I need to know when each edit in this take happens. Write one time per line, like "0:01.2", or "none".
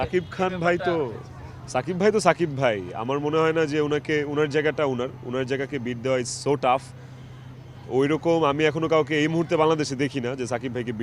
none